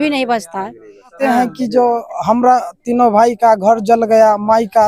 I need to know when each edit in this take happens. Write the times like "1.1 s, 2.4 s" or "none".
1.1 s